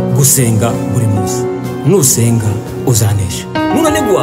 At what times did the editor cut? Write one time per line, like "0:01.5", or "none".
none